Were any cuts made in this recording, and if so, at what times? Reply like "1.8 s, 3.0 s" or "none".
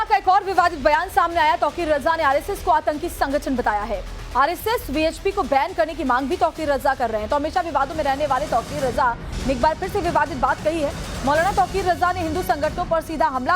2.6 s